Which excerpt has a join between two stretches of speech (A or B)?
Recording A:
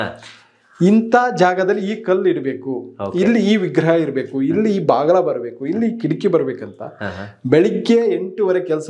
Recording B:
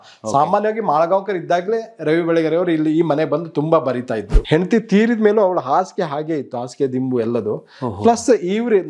B